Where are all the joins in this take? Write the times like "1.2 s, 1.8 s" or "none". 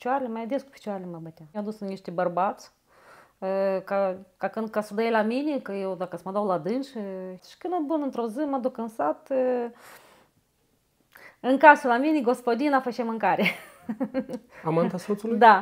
1.5 s, 7.5 s